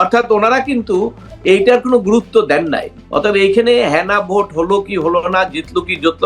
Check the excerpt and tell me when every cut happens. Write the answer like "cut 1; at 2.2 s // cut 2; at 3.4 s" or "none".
cut 1; at 2.9 s

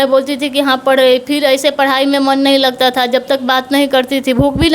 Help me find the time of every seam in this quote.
none

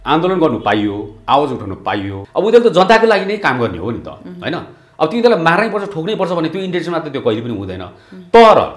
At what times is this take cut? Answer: cut 1; at 2.2 s

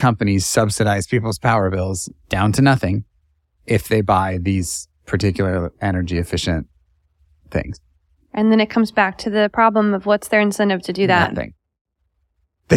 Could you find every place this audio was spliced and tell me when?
none

